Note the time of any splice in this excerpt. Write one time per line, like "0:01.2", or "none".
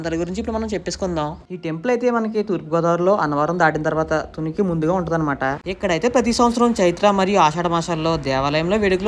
0:01.5
0:05.6